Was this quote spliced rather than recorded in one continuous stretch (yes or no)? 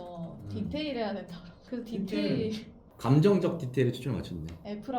no